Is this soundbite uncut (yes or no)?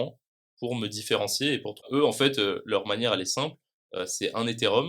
no